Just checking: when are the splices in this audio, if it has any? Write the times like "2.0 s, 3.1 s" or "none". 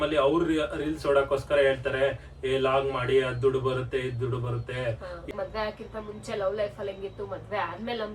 5.3 s

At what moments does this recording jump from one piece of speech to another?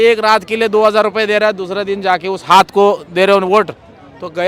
none

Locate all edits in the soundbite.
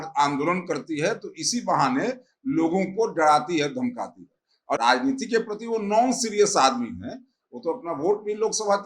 4.8 s

